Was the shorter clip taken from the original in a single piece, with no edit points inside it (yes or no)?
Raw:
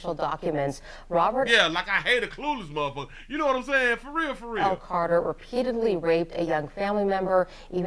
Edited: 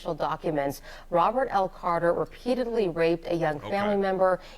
no